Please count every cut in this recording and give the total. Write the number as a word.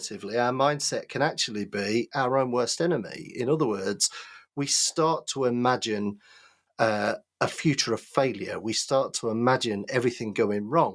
zero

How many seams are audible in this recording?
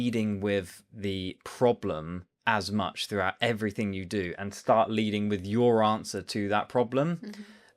zero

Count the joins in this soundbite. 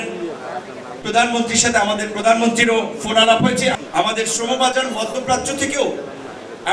one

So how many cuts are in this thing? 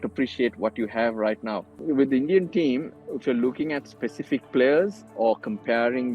two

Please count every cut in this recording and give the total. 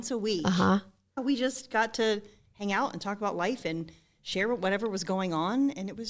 one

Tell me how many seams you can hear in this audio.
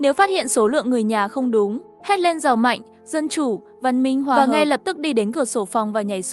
two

